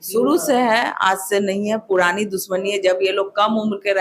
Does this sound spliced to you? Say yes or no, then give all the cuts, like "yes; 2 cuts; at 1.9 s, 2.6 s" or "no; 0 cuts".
no; 0 cuts